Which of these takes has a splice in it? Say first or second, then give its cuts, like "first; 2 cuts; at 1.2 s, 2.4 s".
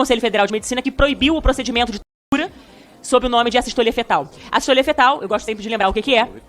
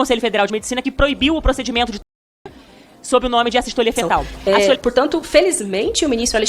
second; 1 cut; at 4.3 s